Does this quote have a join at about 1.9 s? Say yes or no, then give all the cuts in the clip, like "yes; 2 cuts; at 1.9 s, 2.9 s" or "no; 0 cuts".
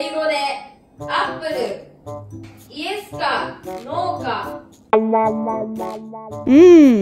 no; 0 cuts